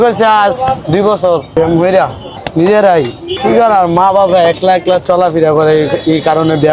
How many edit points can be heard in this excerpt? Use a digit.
2